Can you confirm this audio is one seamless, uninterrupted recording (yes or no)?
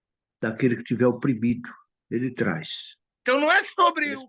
no